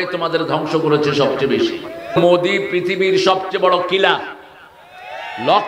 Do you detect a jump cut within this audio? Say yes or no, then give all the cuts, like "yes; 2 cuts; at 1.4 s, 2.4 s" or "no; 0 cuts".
yes; 1 cut; at 2.1 s